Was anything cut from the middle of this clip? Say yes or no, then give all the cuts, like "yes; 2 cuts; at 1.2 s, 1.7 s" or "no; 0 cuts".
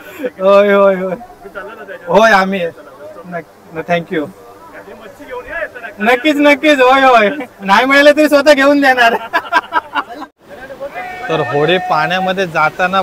yes; 1 cut; at 10.3 s